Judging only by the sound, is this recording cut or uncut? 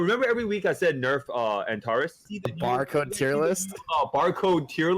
cut